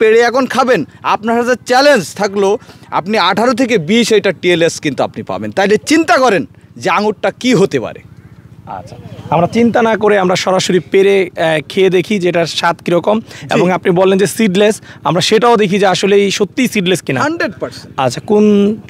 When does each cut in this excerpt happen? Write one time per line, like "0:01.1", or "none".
none